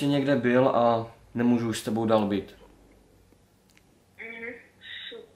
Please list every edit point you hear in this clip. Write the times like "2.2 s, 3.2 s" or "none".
none